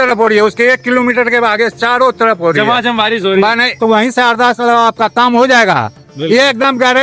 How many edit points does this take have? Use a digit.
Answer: 1